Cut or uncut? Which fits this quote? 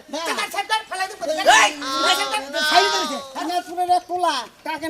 cut